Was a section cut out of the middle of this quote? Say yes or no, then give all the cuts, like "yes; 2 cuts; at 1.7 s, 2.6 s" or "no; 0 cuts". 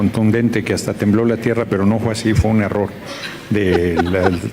no; 0 cuts